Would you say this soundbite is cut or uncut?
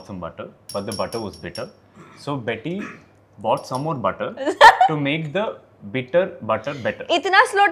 uncut